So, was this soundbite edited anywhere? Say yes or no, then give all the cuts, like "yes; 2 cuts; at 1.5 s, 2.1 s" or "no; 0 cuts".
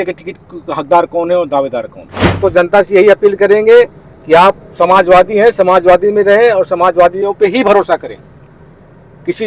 yes; 1 cut; at 2.4 s